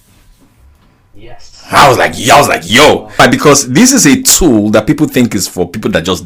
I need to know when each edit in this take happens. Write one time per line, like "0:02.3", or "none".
0:03.2

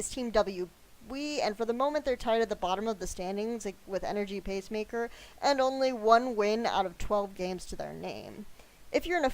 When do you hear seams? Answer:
0:04.6

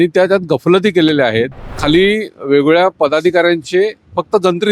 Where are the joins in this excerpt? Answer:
0:01.8

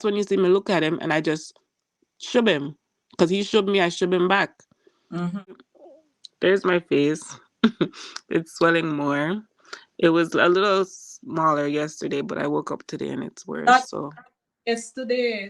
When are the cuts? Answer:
0:05.7

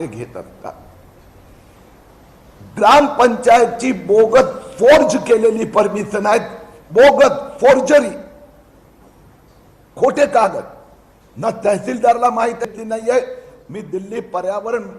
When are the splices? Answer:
0:12.6

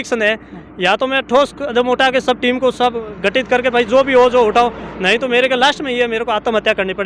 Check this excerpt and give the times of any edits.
none

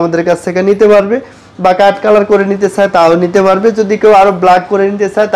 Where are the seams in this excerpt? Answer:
none

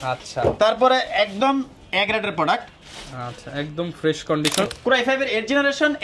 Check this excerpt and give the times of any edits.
0:04.7

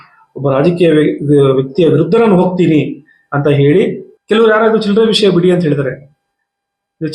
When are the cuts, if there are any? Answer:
0:04.1

